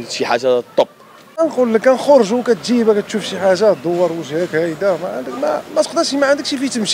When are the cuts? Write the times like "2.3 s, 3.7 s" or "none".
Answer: 1.4 s